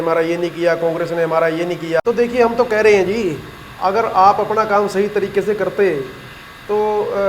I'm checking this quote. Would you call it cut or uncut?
cut